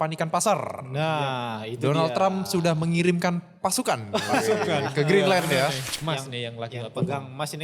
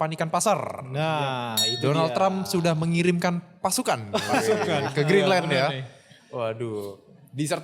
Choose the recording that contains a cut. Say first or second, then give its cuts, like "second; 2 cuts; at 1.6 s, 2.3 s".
first; 1 cut; at 5.9 s